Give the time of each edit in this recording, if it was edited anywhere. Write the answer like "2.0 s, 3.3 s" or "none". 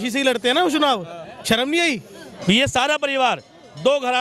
2.3 s